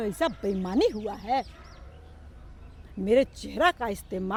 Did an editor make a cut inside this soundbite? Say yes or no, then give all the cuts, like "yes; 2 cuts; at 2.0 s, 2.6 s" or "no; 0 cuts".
no; 0 cuts